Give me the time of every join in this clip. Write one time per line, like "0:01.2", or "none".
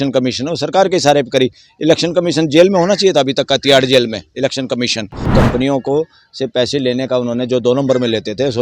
0:05.3